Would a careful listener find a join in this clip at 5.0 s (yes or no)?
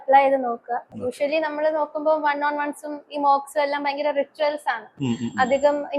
no